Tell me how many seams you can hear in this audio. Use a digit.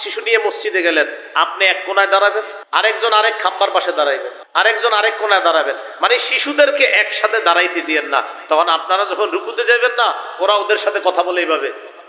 2